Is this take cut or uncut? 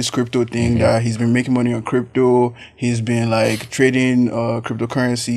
uncut